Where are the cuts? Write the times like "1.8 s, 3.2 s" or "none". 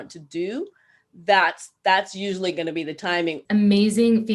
3.4 s